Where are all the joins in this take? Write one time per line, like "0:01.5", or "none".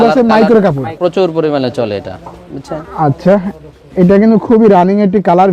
0:00.9